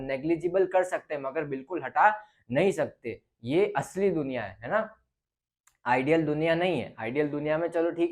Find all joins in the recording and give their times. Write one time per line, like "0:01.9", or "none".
none